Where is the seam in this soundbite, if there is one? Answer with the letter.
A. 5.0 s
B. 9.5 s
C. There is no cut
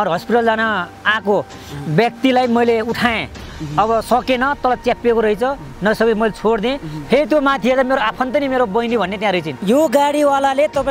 B